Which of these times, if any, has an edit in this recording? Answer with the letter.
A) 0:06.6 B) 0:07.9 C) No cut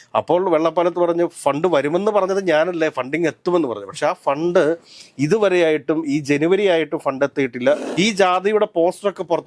B